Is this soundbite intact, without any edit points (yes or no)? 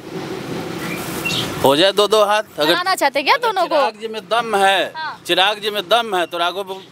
yes